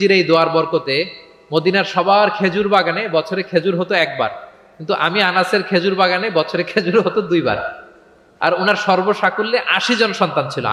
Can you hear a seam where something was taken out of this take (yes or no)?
no